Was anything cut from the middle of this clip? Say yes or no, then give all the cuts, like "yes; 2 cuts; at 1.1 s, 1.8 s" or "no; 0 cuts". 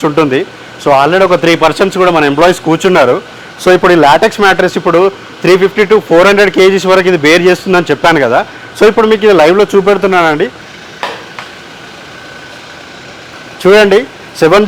yes; 2 cuts; at 10.6 s, 13.3 s